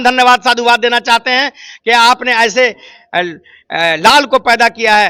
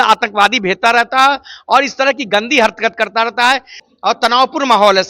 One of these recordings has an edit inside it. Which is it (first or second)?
second